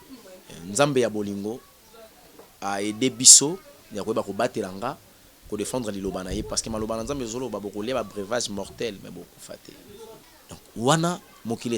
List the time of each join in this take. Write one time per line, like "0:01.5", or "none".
0:10.2